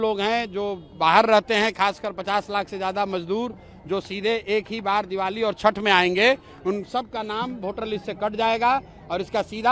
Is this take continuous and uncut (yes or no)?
yes